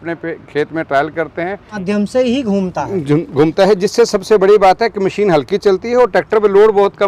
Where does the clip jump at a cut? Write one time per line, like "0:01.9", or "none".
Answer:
0:01.8